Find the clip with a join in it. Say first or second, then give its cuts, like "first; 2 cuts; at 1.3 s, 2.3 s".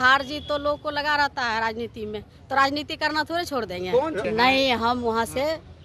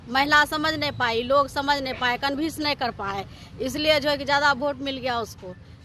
first; 1 cut; at 4.2 s